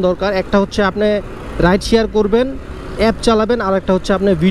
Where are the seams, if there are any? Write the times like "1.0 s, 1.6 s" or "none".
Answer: none